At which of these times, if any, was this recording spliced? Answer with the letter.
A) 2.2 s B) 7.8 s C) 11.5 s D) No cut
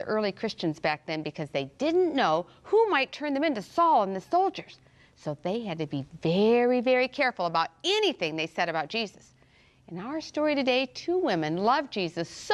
A